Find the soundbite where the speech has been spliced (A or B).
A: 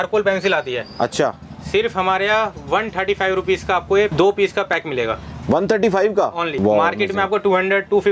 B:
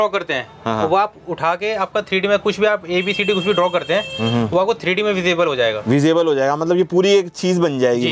A